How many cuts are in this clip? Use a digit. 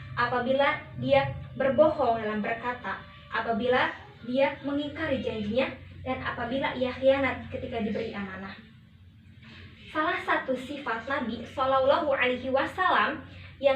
0